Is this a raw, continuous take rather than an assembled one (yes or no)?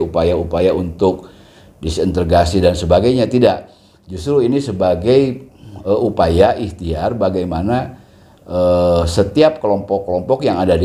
yes